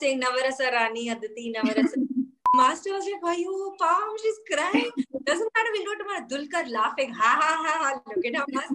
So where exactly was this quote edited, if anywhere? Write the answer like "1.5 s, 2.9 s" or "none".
2.4 s